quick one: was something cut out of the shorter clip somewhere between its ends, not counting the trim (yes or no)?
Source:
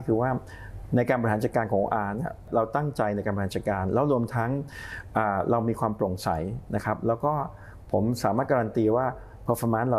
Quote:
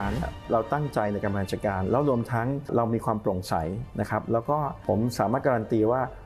yes